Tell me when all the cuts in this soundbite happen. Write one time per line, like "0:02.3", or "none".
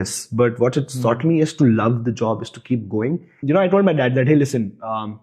0:03.3

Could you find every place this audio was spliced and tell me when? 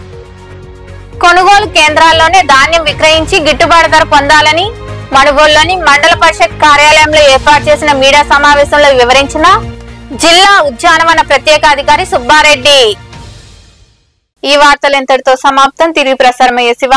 none

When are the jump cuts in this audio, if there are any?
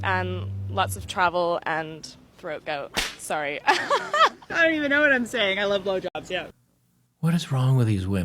0:04.4

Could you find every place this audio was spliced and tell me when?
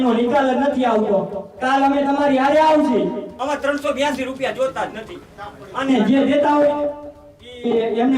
0:03.3

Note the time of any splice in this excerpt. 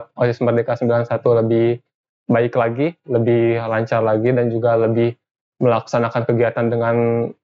none

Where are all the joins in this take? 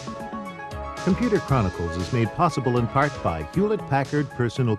0:01.0

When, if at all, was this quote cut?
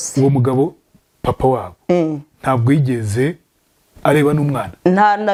none

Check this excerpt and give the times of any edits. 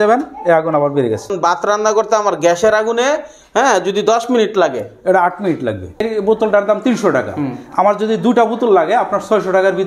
0:01.3
0:06.0

